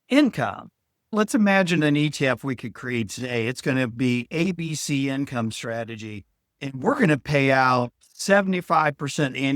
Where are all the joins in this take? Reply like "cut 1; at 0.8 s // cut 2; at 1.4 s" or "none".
cut 1; at 1.1 s